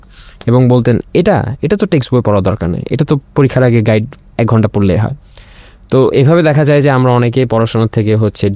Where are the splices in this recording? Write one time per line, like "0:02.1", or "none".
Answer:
none